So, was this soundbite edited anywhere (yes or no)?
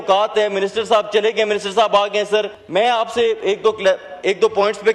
yes